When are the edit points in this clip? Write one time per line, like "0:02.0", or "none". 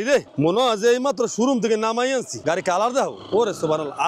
0:02.3